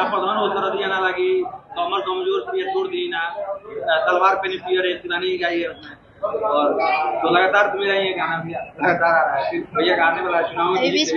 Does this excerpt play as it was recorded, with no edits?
yes; 0 cuts

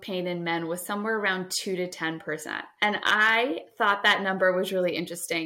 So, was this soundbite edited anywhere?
yes; 1 cut; at 2.6 s

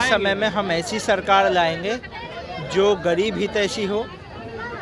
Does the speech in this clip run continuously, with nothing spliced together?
yes; 0 cuts

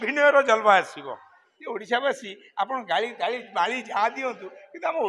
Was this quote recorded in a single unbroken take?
no; 1 cut; at 1.3 s

